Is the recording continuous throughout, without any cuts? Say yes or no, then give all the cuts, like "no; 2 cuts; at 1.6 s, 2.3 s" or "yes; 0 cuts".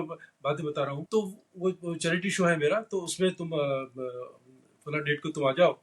no; 1 cut; at 1.0 s